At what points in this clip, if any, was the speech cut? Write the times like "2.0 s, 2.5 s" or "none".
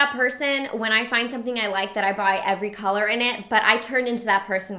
none